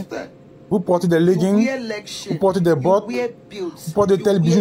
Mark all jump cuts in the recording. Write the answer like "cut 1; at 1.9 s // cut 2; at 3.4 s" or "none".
none